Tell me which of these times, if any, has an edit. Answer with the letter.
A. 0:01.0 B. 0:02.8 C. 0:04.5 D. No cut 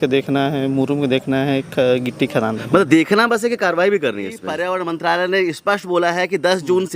C